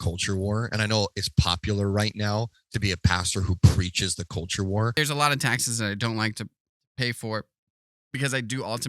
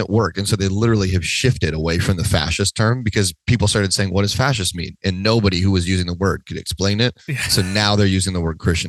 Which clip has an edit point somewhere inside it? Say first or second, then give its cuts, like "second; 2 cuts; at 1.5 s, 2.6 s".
first; 1 cut; at 4.9 s